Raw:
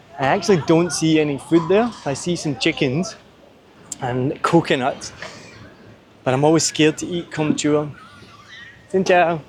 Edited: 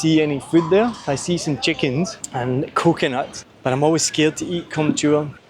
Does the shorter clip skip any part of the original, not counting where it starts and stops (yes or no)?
yes